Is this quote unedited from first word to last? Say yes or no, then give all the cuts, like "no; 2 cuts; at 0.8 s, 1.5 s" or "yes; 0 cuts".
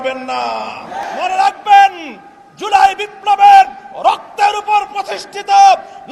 no; 1 cut; at 1.0 s